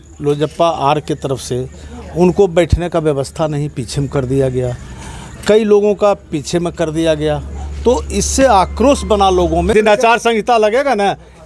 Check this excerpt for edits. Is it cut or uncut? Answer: cut